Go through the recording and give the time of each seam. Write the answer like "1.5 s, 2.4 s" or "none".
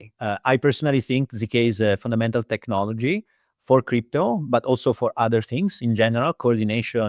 none